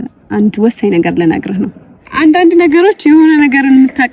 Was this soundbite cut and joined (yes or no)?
yes